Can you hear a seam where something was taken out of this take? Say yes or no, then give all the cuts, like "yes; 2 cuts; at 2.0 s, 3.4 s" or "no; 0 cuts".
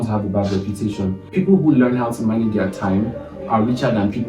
yes; 1 cut; at 1.3 s